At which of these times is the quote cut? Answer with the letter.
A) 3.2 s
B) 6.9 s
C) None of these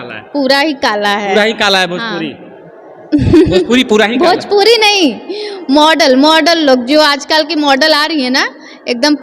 C